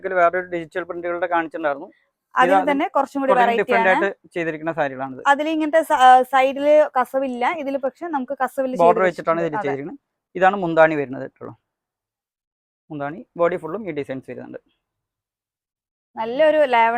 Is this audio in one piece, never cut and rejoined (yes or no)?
yes